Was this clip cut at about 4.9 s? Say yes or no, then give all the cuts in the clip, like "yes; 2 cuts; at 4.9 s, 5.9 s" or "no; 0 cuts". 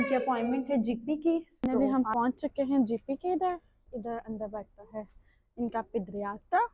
no; 1 cut; at 1.6 s